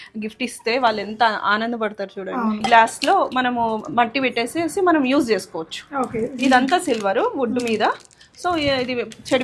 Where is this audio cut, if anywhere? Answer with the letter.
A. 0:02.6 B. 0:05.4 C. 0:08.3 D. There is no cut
A